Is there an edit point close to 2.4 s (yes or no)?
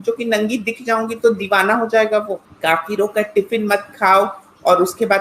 yes